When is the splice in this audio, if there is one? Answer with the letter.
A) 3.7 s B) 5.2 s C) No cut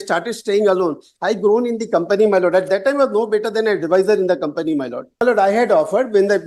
B